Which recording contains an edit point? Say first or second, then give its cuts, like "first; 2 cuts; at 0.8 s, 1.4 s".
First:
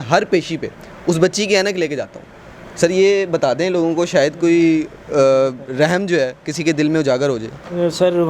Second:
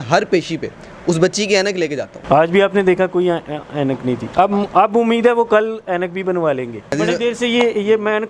second; 2 cuts; at 2.1 s, 6.9 s